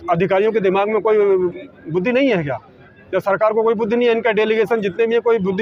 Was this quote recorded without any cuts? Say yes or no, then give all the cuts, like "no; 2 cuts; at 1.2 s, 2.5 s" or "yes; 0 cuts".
yes; 0 cuts